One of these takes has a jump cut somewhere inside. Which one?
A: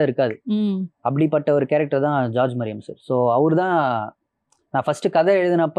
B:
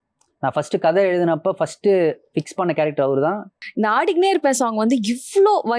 B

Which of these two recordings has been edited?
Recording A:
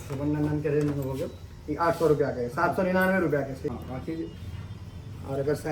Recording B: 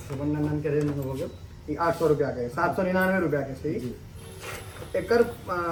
A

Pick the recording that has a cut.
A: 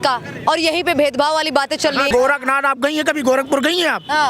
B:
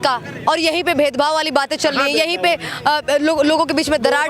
A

